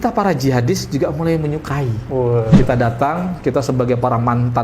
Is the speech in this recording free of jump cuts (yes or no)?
no